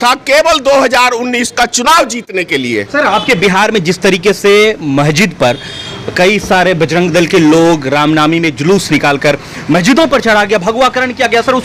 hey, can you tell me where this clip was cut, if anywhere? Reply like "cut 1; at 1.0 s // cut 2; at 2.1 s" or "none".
none